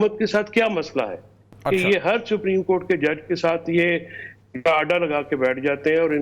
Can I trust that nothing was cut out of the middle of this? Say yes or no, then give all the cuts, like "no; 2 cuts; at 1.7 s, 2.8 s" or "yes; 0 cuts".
yes; 0 cuts